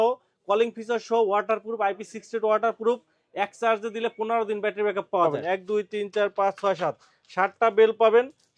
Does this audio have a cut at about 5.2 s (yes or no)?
yes